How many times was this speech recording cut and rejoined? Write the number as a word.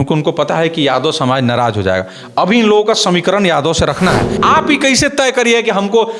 one